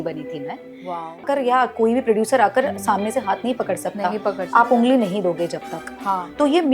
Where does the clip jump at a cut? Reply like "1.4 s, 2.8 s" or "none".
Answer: 1.2 s